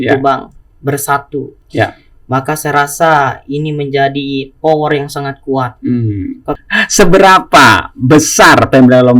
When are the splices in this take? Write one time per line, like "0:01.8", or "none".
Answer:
0:06.6